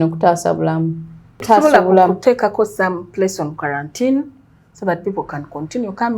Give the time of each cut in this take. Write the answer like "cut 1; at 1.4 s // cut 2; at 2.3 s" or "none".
cut 1; at 1.4 s

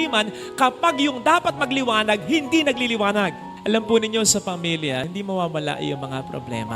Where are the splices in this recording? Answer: cut 1; at 3.5 s

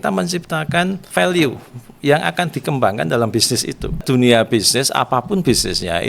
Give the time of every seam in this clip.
cut 1; at 1.0 s // cut 2; at 4.0 s

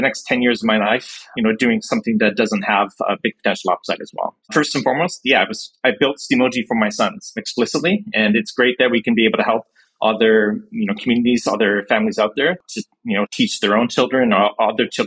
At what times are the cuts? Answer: cut 1; at 4.4 s

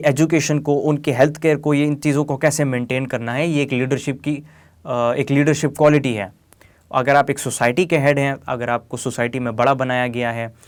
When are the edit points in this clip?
none

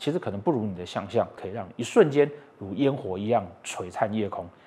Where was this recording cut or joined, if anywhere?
cut 1; at 1.4 s

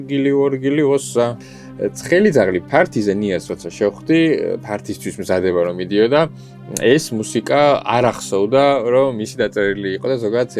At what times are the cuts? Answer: cut 1; at 1.4 s

